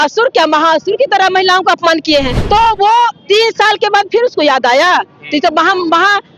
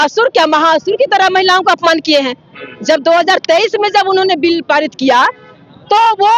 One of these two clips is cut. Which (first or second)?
first